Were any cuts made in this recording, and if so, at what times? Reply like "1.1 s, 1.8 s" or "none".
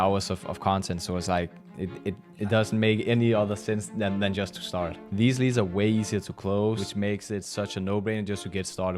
5.0 s, 6.8 s